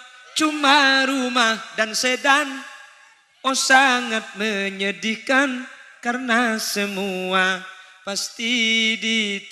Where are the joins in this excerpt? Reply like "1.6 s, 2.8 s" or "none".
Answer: none